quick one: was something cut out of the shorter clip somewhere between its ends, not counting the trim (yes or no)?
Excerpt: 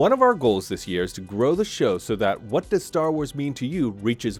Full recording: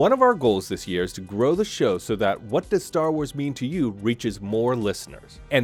no